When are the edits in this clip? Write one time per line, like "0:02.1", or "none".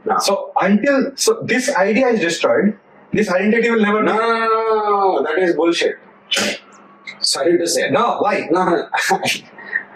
none